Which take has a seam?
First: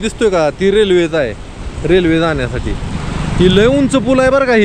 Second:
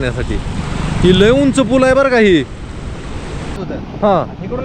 second; 1 cut; at 3.6 s

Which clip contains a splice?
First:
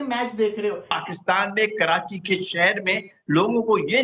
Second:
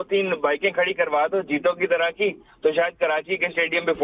first; 1 cut; at 0.9 s

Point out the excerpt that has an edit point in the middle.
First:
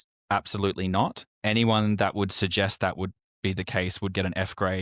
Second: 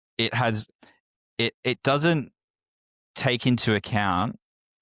first; 1 cut; at 1.3 s

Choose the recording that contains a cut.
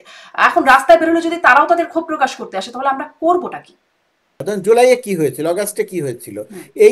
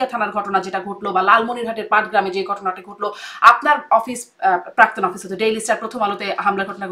first; 1 cut; at 4.3 s

